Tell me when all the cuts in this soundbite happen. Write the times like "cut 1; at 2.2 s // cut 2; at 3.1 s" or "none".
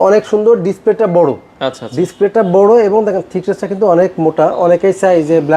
none